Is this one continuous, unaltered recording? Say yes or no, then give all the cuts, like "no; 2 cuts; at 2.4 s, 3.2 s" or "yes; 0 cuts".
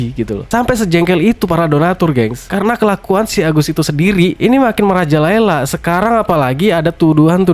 no; 1 cut; at 4.3 s